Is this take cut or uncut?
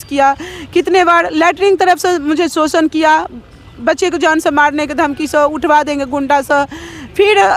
uncut